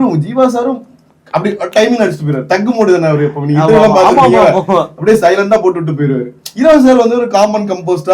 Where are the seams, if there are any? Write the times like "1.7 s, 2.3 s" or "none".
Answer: none